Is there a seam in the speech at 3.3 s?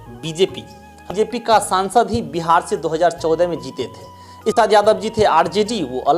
no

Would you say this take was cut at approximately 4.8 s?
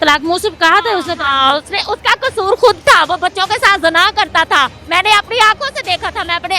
yes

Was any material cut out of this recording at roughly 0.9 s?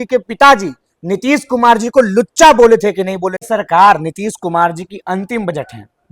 no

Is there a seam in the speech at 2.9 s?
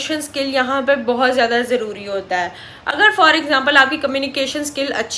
no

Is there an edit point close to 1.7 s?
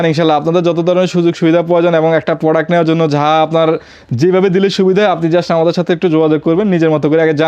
no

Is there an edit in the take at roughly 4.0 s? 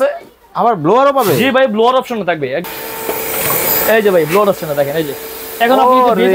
no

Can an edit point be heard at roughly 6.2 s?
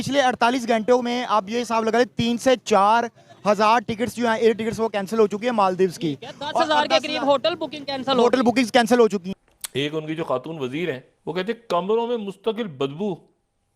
no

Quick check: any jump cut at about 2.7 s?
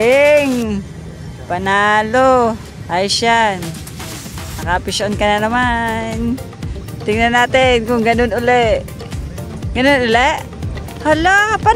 yes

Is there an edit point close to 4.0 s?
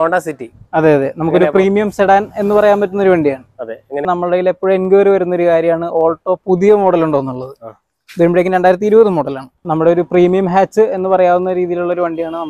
yes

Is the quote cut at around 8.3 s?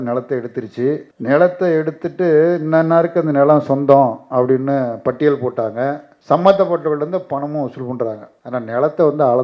yes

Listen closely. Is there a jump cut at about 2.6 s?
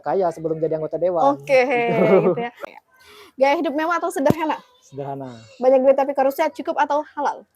yes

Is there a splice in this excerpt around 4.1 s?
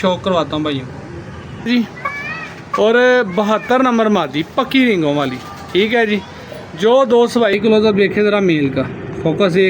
no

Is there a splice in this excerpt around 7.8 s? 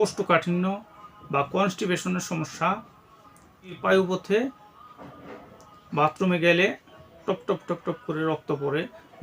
no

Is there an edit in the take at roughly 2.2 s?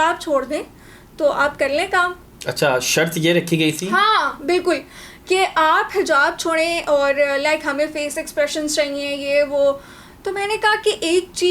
no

